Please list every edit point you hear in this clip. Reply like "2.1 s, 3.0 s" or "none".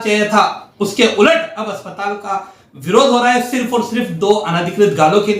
none

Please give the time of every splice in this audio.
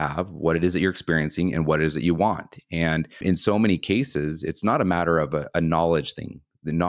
3.1 s

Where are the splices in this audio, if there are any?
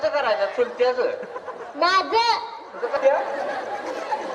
3.0 s

